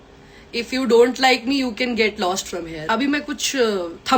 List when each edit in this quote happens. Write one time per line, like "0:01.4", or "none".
0:02.8